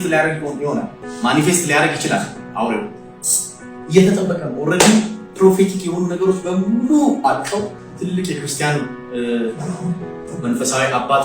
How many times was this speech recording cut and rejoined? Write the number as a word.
two